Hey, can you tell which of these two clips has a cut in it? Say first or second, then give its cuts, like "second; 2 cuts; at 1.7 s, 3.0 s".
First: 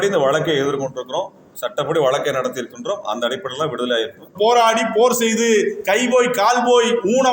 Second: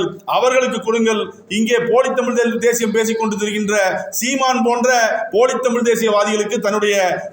first; 1 cut; at 4.3 s